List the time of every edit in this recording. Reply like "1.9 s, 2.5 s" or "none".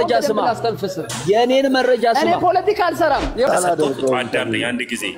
3.5 s